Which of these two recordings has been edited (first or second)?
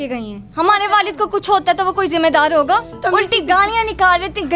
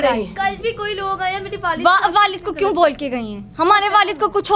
first